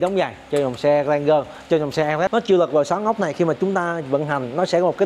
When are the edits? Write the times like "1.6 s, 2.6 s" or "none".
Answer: 2.3 s